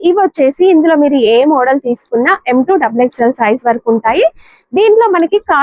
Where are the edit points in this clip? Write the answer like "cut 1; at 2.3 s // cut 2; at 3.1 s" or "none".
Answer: none